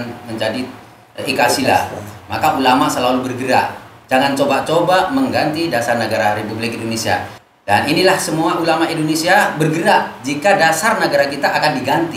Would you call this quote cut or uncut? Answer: cut